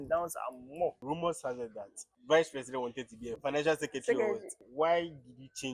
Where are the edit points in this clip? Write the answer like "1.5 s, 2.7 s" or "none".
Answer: 1.0 s, 2.1 s, 3.3 s, 4.6 s